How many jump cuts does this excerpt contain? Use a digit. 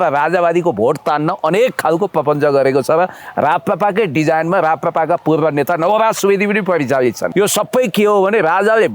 1